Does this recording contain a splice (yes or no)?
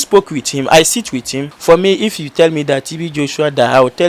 yes